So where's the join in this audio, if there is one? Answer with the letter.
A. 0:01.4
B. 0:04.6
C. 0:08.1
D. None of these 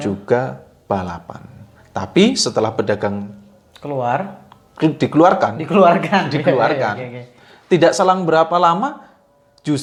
D